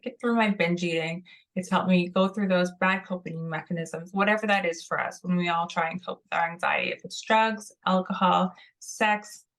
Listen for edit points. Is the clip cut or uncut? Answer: uncut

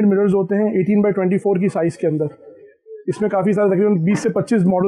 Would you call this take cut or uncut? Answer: uncut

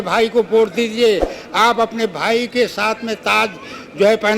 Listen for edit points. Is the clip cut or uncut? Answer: uncut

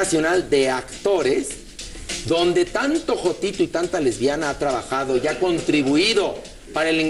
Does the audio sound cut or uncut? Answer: uncut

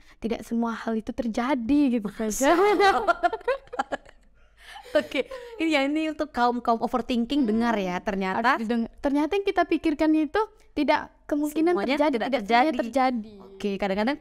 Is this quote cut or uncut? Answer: uncut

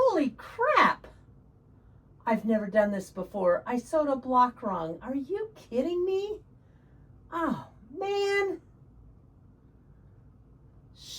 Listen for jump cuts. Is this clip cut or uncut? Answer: uncut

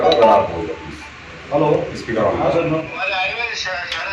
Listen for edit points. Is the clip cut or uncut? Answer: cut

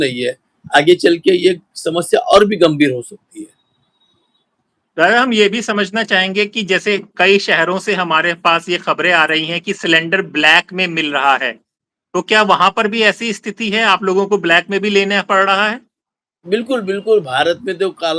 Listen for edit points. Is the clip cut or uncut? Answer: uncut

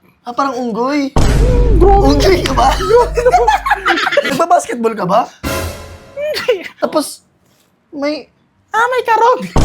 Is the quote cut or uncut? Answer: cut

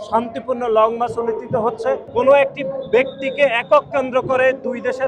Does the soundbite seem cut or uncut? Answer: cut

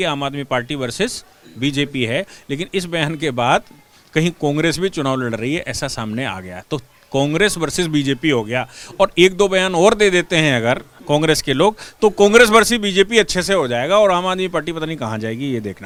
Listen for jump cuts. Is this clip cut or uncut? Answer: uncut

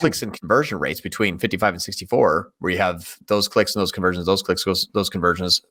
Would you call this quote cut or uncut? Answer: uncut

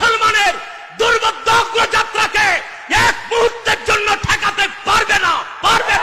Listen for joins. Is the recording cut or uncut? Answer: uncut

